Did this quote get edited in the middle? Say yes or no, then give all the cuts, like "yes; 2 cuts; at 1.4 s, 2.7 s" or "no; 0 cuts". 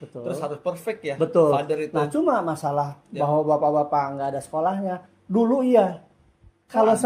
no; 0 cuts